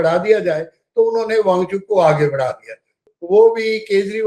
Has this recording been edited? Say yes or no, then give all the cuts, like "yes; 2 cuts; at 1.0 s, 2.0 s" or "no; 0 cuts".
yes; 1 cut; at 3.0 s